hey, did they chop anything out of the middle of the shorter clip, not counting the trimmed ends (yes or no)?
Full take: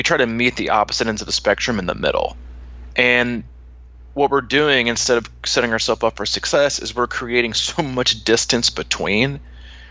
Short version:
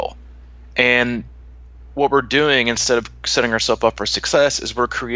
no